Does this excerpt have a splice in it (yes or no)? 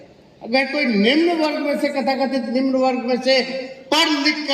no